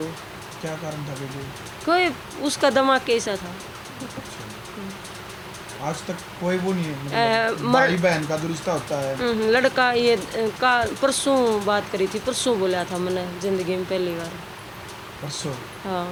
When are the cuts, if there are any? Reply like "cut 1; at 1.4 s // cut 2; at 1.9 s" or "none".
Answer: none